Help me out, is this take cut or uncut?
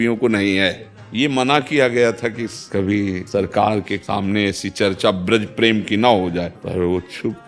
cut